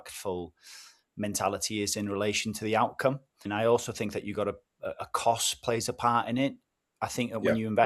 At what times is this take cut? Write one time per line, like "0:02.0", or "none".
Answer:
0:03.4